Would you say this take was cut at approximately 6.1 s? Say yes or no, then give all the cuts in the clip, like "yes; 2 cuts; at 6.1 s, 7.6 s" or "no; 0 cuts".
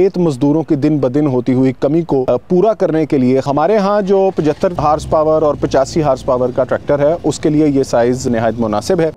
no; 4 cuts; at 2.2 s, 3.5 s, 4.8 s, 8.2 s